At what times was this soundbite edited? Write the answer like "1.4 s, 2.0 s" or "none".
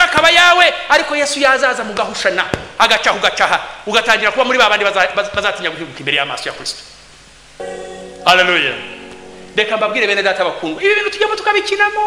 7.6 s